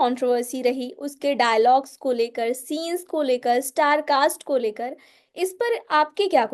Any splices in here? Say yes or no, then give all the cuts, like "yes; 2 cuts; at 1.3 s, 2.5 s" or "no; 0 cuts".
no; 0 cuts